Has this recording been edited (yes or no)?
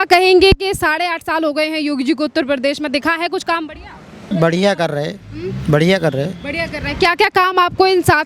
yes